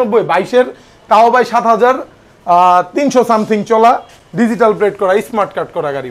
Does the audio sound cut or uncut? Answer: uncut